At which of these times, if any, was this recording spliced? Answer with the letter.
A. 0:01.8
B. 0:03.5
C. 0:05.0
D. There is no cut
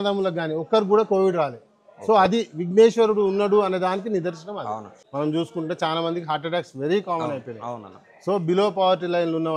C